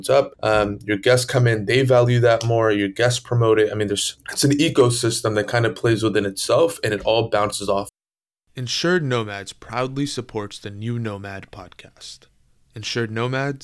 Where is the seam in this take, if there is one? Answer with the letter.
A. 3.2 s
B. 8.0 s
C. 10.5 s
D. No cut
B